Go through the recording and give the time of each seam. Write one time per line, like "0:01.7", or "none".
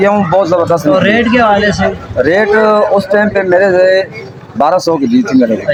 none